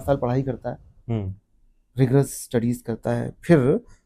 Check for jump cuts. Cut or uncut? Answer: uncut